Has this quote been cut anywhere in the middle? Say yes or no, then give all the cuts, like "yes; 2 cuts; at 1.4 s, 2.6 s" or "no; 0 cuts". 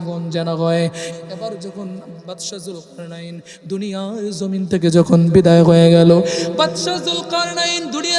yes; 1 cut; at 1.1 s